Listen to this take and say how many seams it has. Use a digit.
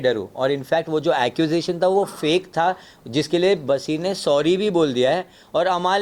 0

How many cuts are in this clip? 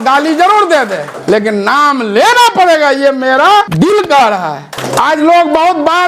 3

